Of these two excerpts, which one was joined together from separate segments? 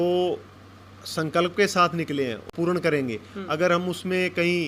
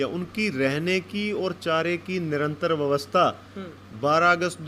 first; 1 cut; at 2.5 s

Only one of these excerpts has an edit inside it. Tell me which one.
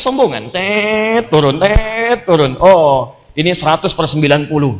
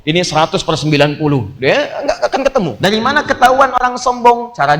second; 1 cut; at 2.8 s

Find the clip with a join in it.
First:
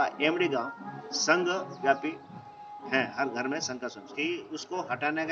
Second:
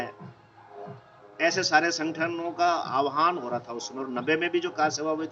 first; 1 cut; at 4.0 s

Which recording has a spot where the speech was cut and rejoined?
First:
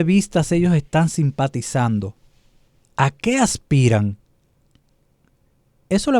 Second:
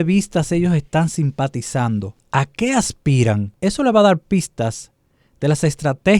second; 2 cuts; at 2.2 s, 3.5 s

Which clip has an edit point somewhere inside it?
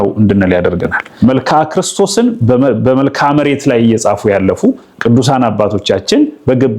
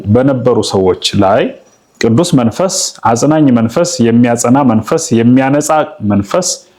first; 1 cut; at 1.0 s

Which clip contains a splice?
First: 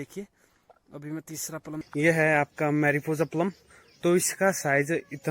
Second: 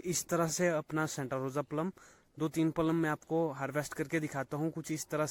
first; 1 cut; at 1.8 s

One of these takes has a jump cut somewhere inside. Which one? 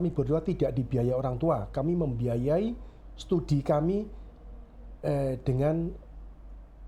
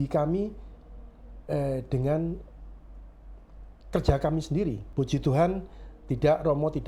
second; 1 cut; at 4.8 s

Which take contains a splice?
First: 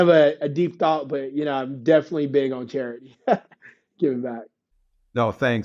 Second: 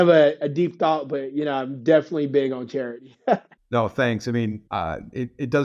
second; 2 cuts; at 3.5 s, 4.6 s

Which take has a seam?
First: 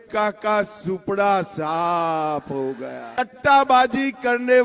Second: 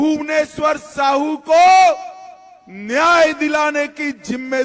first; 1 cut; at 3.2 s

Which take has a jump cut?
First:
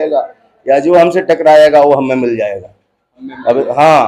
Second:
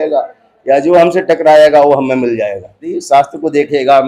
second; 1 cut; at 2.9 s

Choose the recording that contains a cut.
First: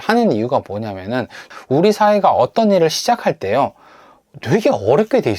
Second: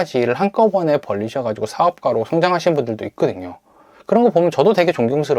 first; 1 cut; at 1.5 s

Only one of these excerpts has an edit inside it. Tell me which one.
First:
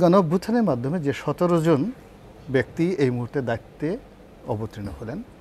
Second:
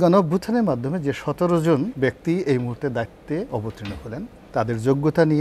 second; 2 cuts; at 1.9 s, 3.8 s

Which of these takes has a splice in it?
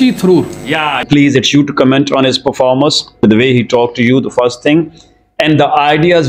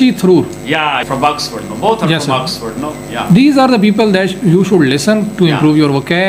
first; 2 cuts; at 1.1 s, 3.2 s

